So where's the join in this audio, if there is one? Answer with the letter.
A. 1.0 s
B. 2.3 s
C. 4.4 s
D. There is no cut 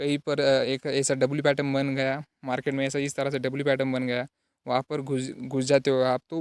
D